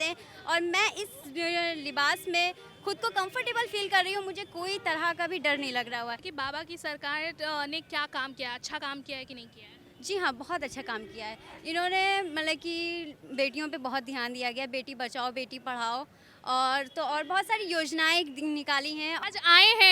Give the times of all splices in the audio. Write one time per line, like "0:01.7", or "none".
0:06.3
0:19.2